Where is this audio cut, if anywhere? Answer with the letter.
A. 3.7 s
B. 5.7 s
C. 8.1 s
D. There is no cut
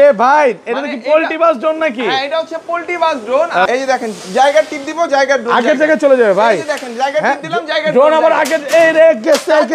A